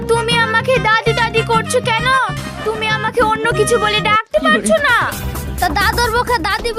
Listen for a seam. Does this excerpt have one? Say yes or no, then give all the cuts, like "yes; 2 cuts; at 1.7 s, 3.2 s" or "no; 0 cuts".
no; 0 cuts